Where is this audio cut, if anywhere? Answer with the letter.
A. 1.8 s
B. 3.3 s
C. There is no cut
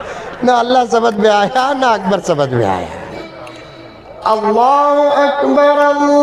B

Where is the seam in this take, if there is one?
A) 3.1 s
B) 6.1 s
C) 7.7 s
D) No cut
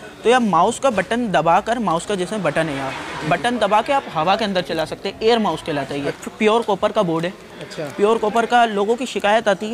B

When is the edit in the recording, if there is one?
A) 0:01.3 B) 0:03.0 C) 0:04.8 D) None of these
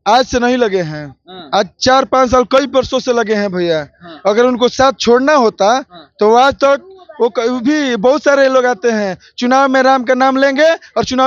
D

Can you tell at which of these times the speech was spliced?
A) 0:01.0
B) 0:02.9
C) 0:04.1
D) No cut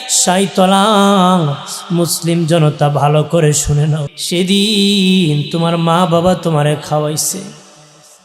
C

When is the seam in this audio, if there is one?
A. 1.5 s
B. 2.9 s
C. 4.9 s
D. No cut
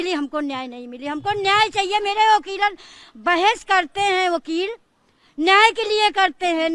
D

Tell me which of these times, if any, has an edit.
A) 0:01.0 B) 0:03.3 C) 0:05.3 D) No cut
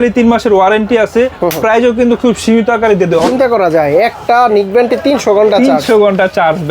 B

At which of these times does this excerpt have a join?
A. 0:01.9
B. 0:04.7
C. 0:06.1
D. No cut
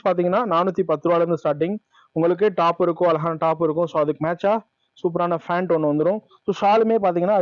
D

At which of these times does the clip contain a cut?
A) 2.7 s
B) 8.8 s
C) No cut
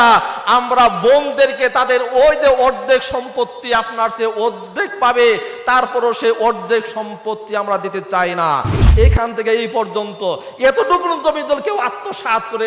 B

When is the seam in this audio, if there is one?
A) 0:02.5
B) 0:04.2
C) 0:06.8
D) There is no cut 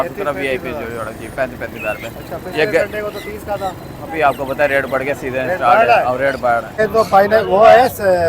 C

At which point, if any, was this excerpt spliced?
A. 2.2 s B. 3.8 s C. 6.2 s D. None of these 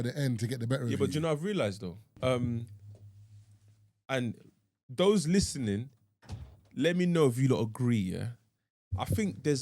A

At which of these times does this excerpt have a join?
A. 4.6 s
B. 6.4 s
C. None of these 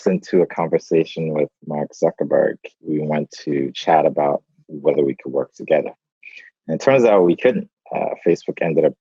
C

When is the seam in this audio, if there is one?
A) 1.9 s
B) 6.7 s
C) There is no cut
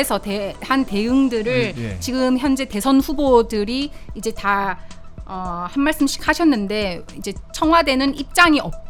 C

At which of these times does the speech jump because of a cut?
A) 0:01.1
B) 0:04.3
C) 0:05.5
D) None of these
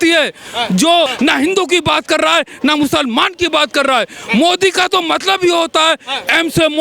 A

